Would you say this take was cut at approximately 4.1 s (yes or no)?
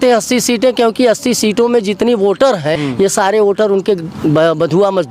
no